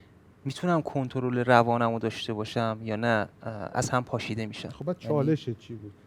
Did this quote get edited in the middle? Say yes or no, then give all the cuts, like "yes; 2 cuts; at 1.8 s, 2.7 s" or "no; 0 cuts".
no; 0 cuts